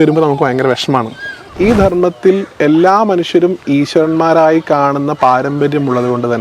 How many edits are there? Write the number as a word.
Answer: one